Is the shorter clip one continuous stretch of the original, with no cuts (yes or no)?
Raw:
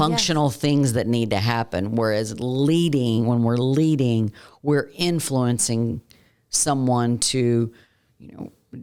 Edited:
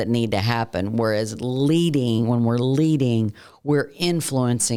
yes